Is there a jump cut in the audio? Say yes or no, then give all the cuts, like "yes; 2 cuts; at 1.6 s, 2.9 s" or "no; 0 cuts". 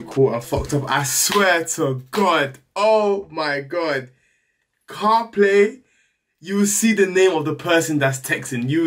no; 0 cuts